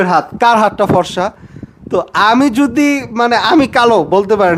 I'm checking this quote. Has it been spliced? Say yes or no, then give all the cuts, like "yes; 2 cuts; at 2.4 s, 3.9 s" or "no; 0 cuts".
no; 0 cuts